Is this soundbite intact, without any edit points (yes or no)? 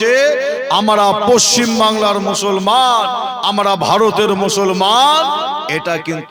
yes